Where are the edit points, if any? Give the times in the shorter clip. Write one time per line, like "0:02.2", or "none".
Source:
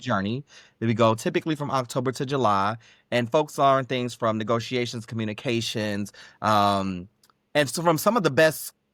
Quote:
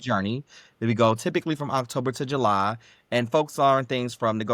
none